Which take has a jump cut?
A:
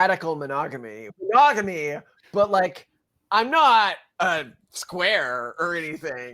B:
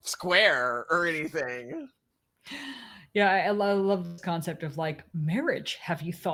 A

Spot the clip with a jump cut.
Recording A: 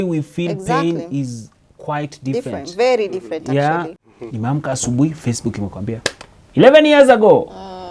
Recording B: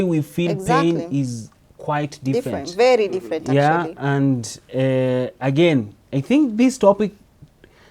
A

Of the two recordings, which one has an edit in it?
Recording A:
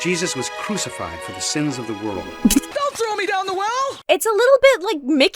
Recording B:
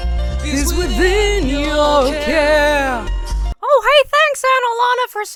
A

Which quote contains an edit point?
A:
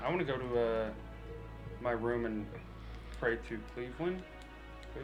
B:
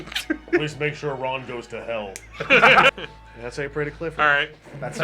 B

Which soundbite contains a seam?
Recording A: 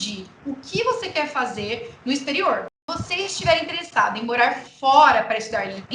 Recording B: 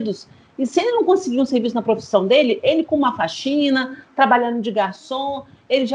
A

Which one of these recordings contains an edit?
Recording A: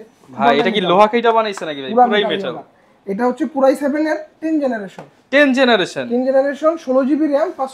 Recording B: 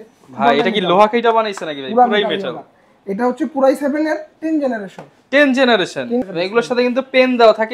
B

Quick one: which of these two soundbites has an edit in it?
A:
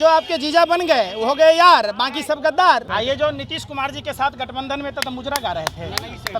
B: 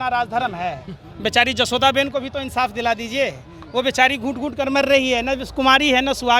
A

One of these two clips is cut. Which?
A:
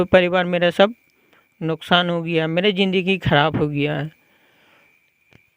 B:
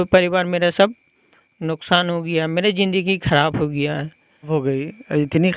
B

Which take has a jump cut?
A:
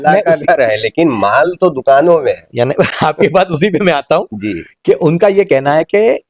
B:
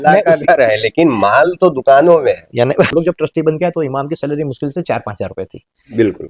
B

